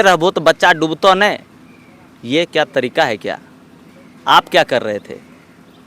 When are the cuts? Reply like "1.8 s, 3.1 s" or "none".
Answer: none

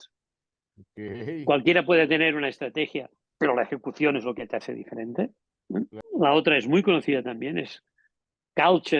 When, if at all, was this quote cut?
6.0 s

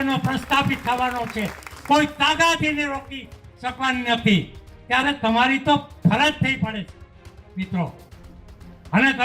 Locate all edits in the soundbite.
none

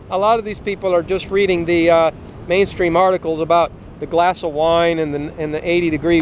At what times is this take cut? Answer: none

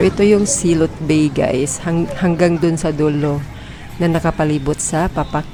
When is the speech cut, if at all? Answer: none

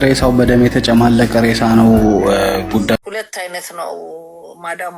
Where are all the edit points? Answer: 1.3 s, 3.0 s

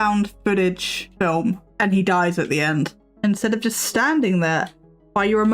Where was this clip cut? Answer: 1.4 s, 3.0 s

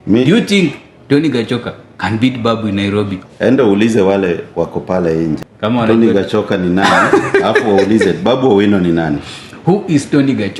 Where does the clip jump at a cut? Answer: 3.2 s, 5.5 s

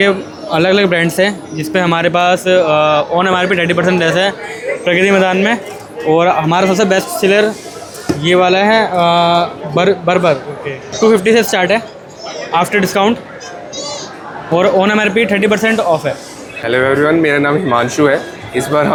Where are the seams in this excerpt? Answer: none

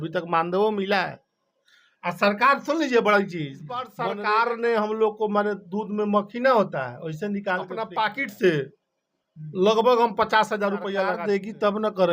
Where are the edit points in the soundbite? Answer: 3.9 s, 7.8 s, 11.1 s

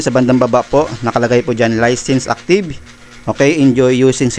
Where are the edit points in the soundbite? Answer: none

